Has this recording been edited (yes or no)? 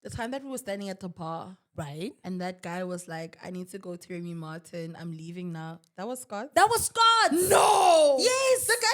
no